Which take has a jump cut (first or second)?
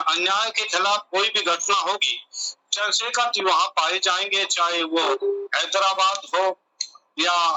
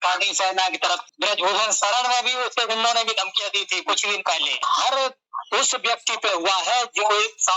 second